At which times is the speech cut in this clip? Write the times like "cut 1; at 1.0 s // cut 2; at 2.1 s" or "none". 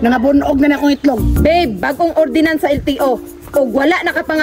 cut 1; at 1.3 s